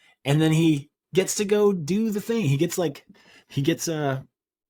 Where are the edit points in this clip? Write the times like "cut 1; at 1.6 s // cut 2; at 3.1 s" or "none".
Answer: none